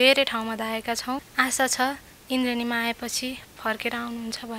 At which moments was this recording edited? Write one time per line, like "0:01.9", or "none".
0:01.3

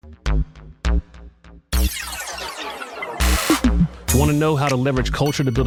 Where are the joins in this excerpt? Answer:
none

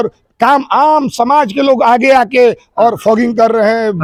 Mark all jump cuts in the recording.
none

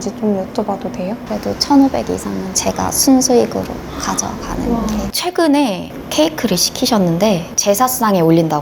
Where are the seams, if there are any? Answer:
0:01.2
0:02.5
0:05.1
0:05.9

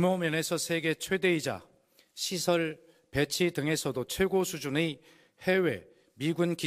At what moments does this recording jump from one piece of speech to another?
0:04.3

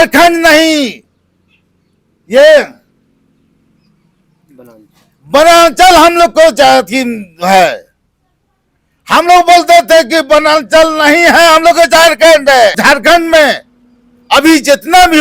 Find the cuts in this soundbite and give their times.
0:12.8

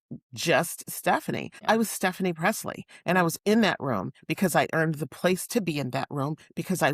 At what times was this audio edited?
0:01.5

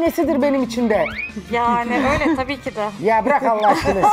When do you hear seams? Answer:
none

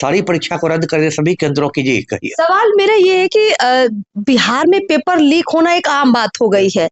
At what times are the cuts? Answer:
none

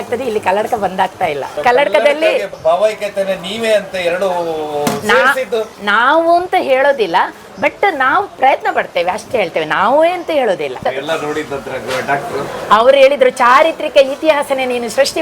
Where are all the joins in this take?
0:01.5
0:02.5
0:10.8

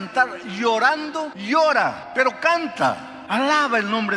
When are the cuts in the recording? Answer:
0:01.4
0:02.0

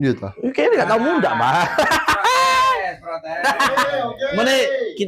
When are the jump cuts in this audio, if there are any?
none

